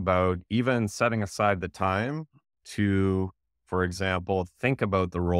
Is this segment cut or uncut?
uncut